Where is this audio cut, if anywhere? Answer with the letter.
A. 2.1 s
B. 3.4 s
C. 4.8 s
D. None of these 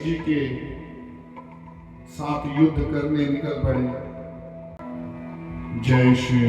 C